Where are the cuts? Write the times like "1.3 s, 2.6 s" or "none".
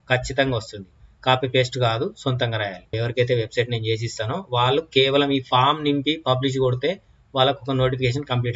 2.9 s